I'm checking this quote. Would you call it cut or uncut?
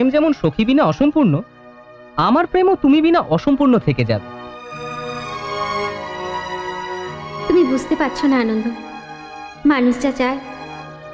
uncut